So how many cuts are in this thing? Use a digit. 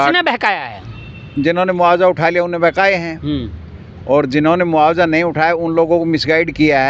0